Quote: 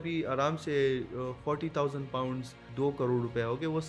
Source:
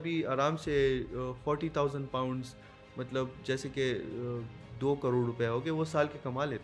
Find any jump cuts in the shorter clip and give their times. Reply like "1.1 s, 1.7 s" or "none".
2.6 s